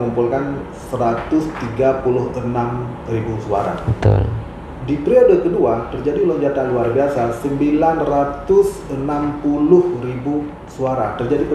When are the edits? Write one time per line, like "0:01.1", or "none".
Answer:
none